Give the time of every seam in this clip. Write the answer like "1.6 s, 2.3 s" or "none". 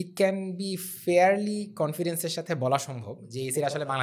none